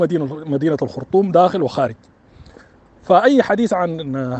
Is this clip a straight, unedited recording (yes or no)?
yes